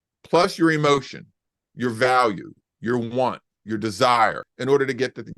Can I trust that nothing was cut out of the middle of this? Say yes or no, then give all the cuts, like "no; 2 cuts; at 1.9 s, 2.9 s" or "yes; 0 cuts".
no; 2 cuts; at 1.1 s, 4.5 s